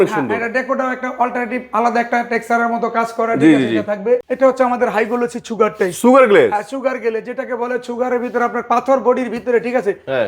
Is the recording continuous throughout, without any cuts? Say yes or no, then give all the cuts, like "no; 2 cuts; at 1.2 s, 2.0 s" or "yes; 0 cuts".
no; 1 cut; at 4.3 s